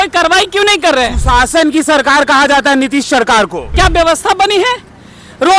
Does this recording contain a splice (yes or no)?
yes